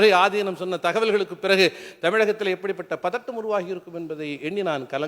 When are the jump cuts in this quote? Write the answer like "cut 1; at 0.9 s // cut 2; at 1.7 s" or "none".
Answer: none